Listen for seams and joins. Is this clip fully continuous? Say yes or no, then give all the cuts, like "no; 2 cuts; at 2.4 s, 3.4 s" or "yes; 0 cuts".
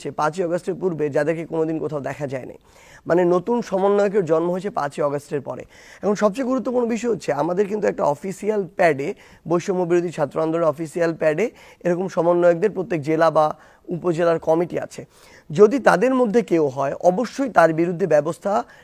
yes; 0 cuts